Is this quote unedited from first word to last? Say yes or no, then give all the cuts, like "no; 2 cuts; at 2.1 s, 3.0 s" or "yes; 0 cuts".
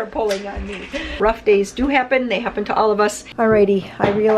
no; 2 cuts; at 1.2 s, 3.2 s